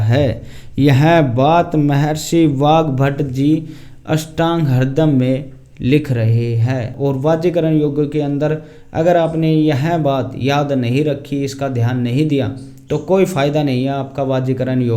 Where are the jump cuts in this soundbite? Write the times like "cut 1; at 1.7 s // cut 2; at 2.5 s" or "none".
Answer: cut 1; at 6.9 s